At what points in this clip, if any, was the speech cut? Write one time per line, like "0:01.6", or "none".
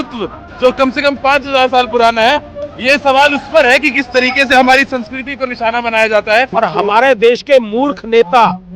0:06.5